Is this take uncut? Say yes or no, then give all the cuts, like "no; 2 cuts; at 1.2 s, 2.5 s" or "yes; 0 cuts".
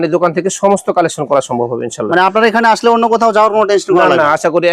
yes; 0 cuts